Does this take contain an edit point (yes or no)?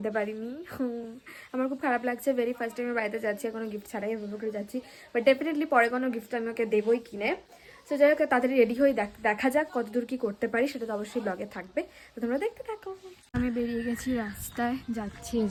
no